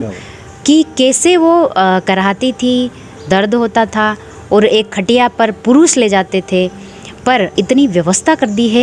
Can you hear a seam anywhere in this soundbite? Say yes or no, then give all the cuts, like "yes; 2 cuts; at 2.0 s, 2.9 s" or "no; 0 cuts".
yes; 1 cut; at 7.6 s